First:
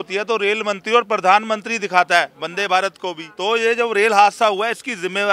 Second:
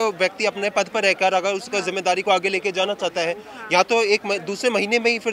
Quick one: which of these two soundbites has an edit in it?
first; 1 cut; at 3.3 s

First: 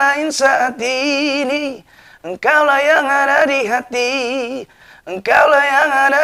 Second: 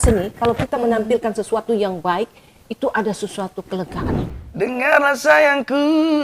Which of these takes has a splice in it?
second; 1 cut; at 4.3 s

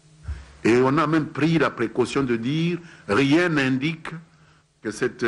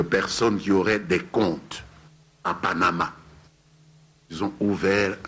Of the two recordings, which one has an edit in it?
first; 1 cut; at 3.1 s

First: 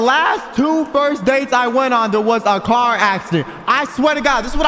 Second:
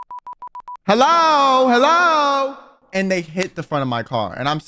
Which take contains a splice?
second; 2 cuts; at 0.8 s, 2.8 s

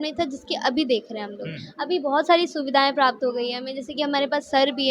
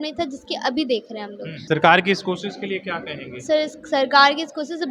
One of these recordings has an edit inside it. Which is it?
second; 1 cut; at 1.6 s

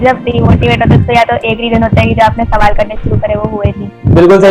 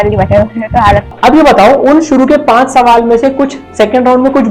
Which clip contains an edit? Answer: second; 1 cut; at 1.1 s

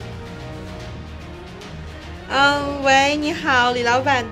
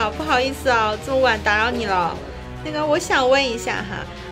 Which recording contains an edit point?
first; 1 cut; at 2.3 s

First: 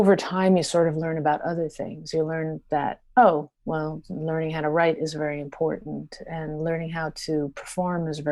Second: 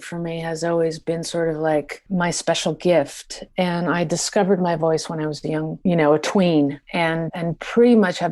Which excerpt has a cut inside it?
second; 3 cuts; at 2.0 s, 5.7 s, 7.2 s

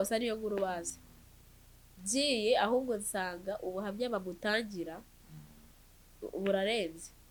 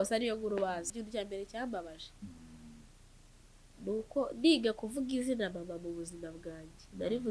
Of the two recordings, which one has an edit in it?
second; 1 cut; at 0.9 s

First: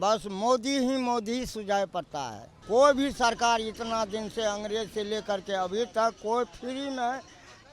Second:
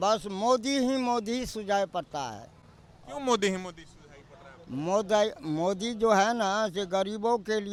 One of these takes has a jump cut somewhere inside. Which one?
first; 1 cut; at 2.6 s

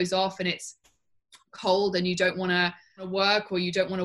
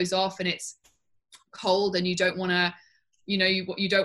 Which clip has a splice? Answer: first; 1 cut; at 3.1 s

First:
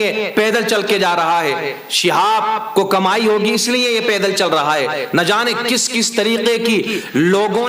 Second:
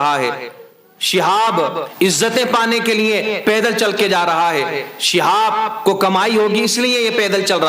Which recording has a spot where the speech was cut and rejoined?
second; 1 cut; at 1.8 s

